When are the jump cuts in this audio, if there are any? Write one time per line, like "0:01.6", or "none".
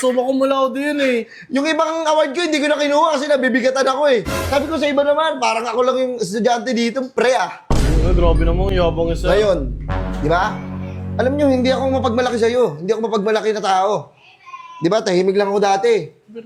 none